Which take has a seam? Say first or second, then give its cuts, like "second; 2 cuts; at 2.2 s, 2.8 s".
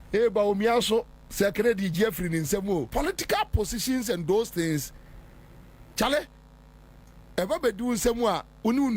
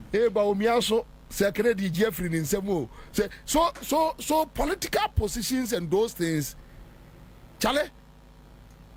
first; 1 cut; at 2.9 s